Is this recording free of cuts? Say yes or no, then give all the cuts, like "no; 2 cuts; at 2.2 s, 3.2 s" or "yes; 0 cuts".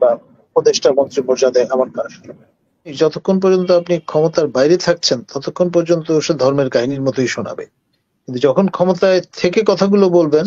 no; 1 cut; at 2.9 s